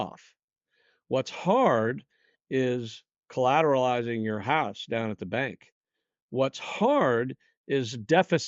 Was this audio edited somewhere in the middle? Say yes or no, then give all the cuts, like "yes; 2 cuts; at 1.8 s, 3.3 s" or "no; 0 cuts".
no; 0 cuts